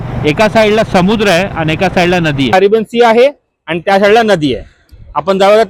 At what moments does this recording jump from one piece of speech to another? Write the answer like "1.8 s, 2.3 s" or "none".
2.5 s